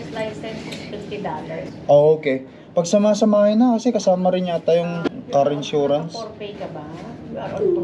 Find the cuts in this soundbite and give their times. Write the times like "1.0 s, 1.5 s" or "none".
1.7 s, 5.1 s